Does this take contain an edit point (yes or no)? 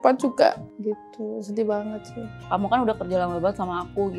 yes